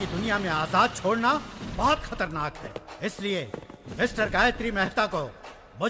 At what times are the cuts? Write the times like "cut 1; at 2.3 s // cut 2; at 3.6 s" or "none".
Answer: none

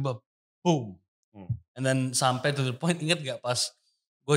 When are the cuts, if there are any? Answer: none

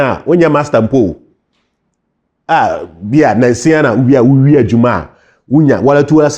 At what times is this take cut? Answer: none

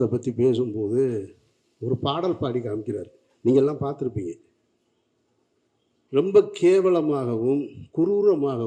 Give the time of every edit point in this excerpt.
none

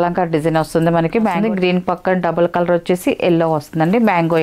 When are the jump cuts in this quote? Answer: cut 1; at 1.4 s

